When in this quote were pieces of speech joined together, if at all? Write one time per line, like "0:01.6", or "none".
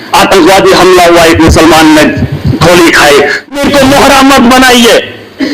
0:03.5